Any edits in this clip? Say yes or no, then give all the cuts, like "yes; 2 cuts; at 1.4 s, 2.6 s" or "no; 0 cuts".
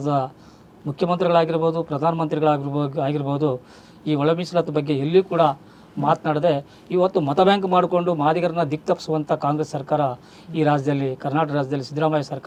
no; 0 cuts